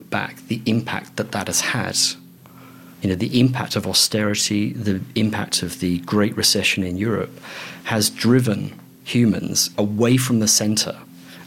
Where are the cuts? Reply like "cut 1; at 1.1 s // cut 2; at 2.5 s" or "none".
none